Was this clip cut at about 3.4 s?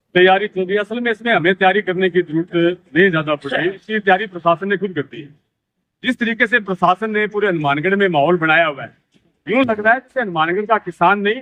no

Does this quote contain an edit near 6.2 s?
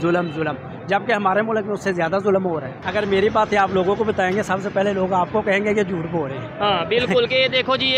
no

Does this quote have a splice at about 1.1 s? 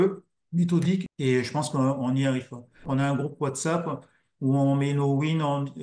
yes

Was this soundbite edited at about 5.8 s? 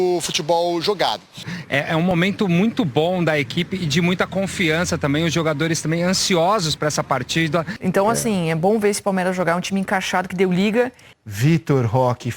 no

